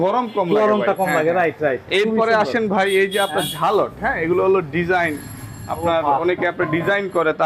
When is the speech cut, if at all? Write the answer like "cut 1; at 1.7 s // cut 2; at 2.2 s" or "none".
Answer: none

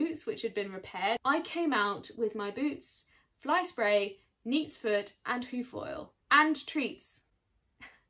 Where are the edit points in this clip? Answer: cut 1; at 1.2 s // cut 2; at 6.1 s

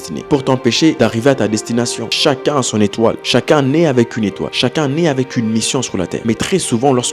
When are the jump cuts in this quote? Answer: cut 1; at 1.0 s // cut 2; at 2.0 s // cut 3; at 4.5 s // cut 4; at 6.2 s

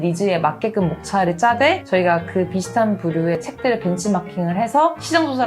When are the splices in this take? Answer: cut 1; at 3.4 s

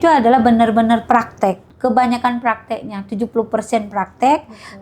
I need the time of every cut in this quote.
cut 1; at 1.7 s

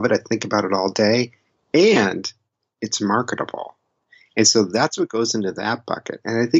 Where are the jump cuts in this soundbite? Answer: none

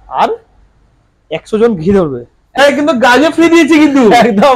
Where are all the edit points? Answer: cut 1; at 2.6 s

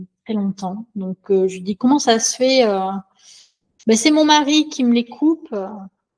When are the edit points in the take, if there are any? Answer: none

